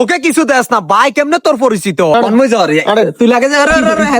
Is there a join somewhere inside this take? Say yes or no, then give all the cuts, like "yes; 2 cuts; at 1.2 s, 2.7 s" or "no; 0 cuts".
yes; 1 cut; at 2.1 s